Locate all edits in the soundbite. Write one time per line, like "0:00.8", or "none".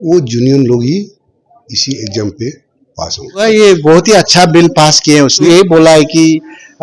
0:03.4
0:05.5